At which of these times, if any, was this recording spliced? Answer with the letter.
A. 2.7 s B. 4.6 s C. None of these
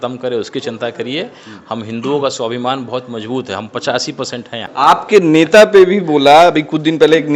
B